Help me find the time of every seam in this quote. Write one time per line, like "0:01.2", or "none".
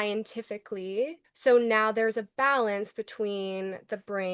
0:01.3